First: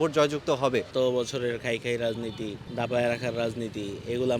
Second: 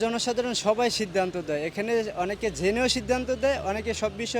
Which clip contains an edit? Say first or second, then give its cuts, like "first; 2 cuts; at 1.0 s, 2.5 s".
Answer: first; 2 cuts; at 0.9 s, 2.6 s